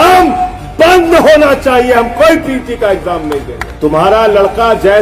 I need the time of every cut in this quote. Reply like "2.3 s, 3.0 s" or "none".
3.6 s

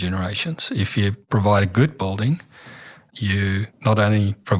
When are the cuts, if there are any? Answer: 1.2 s, 3.4 s

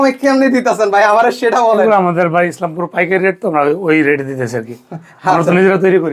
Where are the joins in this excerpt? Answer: none

